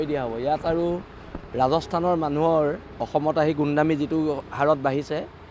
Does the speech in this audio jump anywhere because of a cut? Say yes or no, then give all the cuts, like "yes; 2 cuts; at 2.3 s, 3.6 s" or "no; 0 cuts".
no; 0 cuts